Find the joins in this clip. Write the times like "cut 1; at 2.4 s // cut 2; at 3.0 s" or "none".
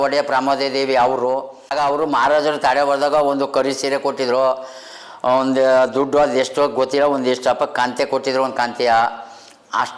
cut 1; at 1.7 s

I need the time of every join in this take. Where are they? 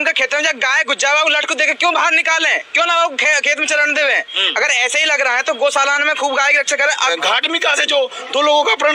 cut 1; at 7.1 s

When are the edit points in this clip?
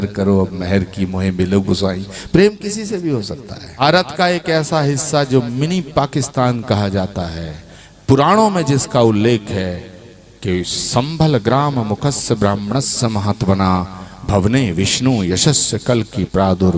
cut 1; at 3.8 s

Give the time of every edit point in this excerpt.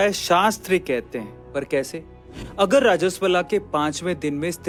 none

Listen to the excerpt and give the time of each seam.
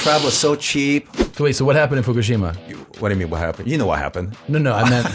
cut 1; at 1.2 s // cut 2; at 2.8 s

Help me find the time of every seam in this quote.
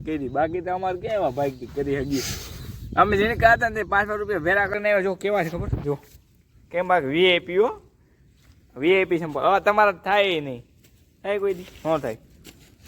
cut 1; at 4.7 s

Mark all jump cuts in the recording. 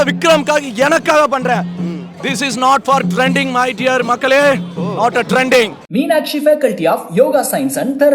cut 1; at 5.8 s

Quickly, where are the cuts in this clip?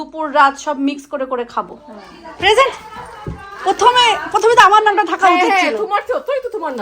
cut 1; at 1.7 s

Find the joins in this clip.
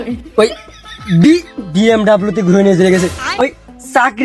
cut 1; at 3.2 s

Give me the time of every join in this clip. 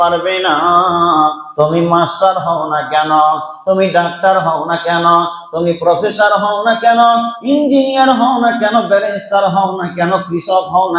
cut 1; at 1.4 s

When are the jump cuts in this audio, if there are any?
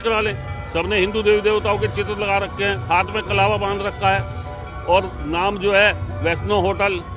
none

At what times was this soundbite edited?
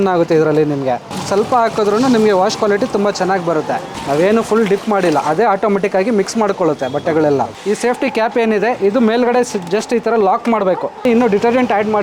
cut 1; at 1.1 s // cut 2; at 3.9 s // cut 3; at 7.5 s // cut 4; at 11.0 s

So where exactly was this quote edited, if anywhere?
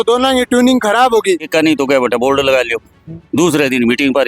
cut 1; at 1.5 s

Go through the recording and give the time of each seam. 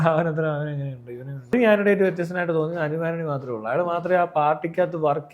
cut 1; at 1.5 s

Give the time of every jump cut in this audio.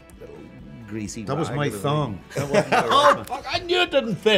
none

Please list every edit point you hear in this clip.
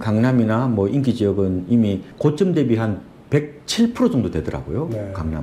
cut 1; at 2.1 s

